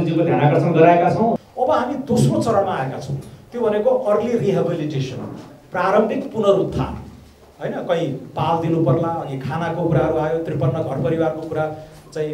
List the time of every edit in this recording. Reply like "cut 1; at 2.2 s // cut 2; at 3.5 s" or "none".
cut 1; at 1.4 s